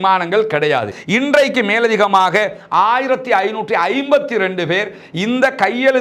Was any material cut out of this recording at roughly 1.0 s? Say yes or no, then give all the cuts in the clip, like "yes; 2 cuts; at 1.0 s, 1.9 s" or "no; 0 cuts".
yes; 1 cut; at 1.0 s